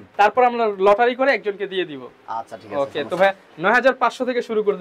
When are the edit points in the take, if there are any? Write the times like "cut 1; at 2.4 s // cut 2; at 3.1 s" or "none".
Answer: none